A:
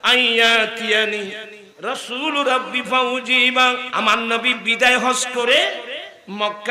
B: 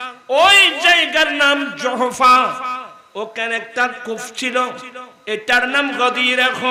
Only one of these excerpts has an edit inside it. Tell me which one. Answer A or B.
A